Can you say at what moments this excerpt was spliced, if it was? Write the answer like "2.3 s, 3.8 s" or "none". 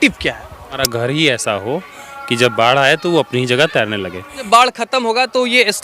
0.9 s, 4.5 s

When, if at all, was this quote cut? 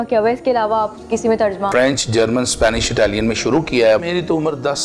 1.7 s, 4.0 s

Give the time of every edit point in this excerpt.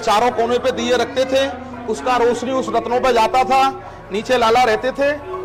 none

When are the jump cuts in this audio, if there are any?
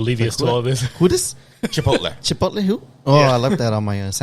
none

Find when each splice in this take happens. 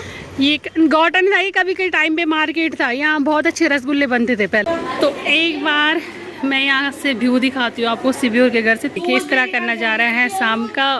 4.6 s, 9.0 s

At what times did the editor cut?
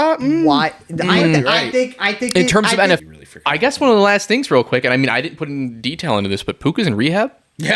3.0 s

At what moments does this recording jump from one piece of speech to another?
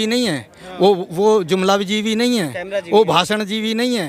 none

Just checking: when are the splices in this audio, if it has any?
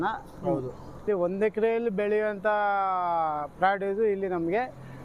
1.0 s

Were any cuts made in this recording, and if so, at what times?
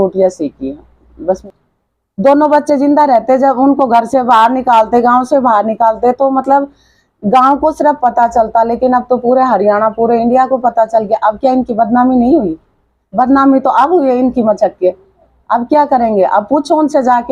1.4 s

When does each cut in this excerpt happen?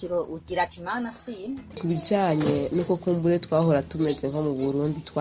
1.8 s

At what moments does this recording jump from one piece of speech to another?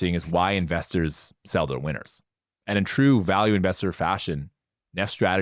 none

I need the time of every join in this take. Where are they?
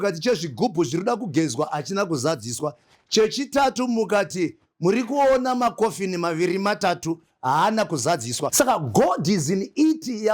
8.5 s

